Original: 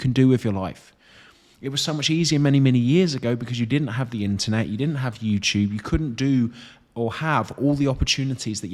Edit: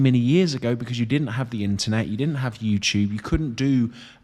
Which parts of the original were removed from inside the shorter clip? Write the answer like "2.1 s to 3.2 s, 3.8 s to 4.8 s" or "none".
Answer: none